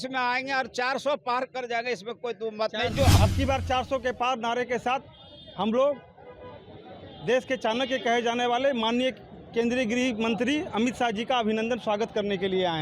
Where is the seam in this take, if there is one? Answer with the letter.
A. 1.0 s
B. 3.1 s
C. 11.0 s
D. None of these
B